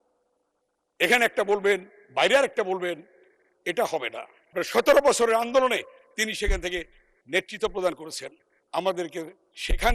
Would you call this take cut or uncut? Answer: cut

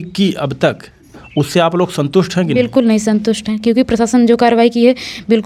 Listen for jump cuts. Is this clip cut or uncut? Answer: uncut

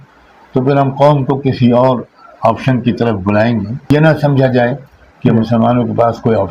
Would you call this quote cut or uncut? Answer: cut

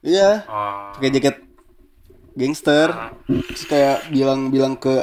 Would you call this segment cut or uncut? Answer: uncut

